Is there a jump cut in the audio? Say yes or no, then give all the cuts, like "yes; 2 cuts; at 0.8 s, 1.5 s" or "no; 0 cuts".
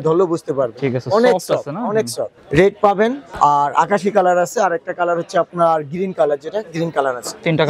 yes; 2 cuts; at 2.3 s, 3.2 s